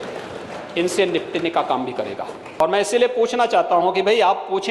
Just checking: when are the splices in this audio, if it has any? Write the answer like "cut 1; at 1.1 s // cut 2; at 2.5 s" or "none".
cut 1; at 2.5 s